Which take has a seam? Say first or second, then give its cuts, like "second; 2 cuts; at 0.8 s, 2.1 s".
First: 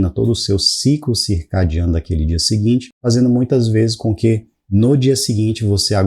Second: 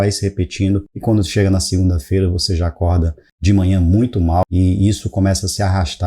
second; 2 cuts; at 3.2 s, 4.4 s